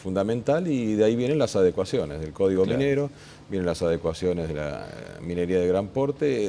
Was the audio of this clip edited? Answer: no; 0 cuts

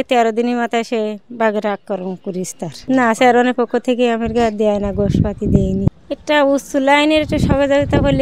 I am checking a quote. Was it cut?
yes; 2 cuts; at 2.7 s, 5.9 s

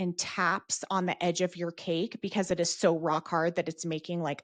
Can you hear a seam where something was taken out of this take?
no; 0 cuts

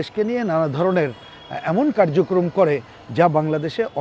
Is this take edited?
no; 0 cuts

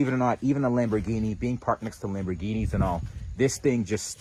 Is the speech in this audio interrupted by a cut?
no; 0 cuts

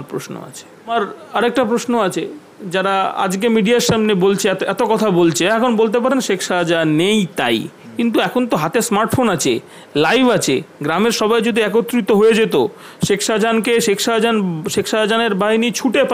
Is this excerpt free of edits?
no; 1 cut; at 0.9 s

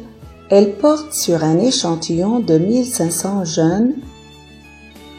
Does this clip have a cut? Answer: no; 0 cuts

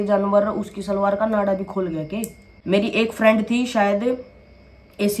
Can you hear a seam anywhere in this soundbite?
yes; 1 cut; at 2.5 s

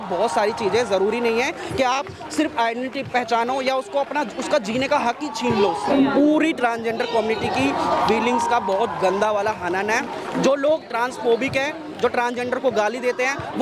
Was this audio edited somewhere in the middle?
yes; 1 cut; at 5.8 s

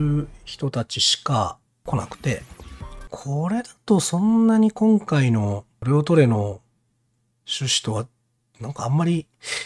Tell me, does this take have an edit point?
yes; 3 cuts; at 1.8 s, 3.1 s, 5.7 s

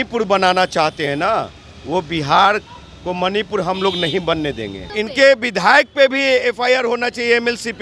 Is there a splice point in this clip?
yes; 1 cut; at 4.9 s

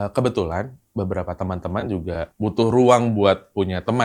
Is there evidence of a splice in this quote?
yes; 1 cut; at 2.3 s

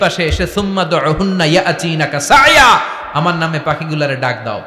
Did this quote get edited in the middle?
no; 0 cuts

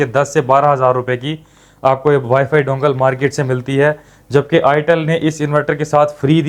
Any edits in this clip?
no; 0 cuts

